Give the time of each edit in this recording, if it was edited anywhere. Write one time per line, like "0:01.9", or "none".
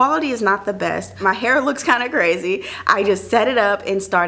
0:01.1